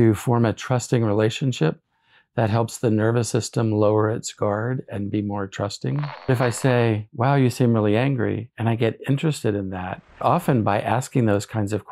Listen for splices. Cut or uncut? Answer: cut